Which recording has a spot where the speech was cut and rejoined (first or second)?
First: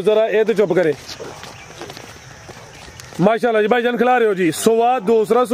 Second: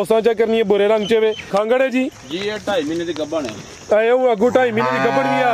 second